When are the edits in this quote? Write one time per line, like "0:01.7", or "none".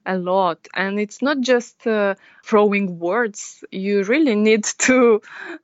0:02.3